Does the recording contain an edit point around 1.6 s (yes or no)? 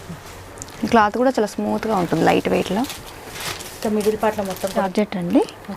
no